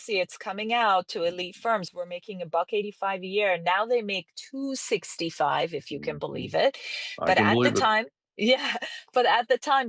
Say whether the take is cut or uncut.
uncut